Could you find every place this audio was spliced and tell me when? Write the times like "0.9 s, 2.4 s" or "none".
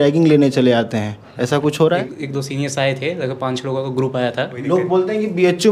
2.1 s, 4.6 s

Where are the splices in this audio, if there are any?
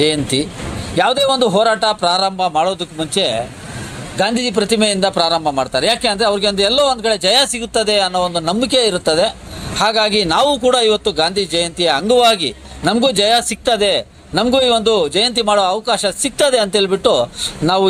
none

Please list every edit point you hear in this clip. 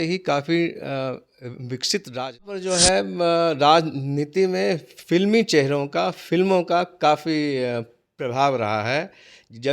2.6 s

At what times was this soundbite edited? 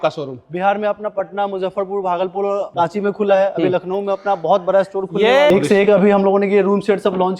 2.7 s, 5.5 s

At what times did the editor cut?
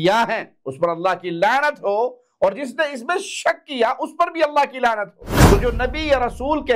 5.2 s

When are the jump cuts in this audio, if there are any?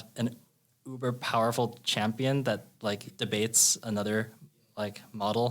3.1 s

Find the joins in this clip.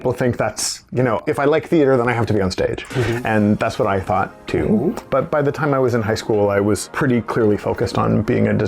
1.2 s, 5.0 s, 6.9 s

